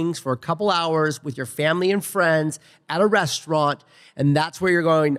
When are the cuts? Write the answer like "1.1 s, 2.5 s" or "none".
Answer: none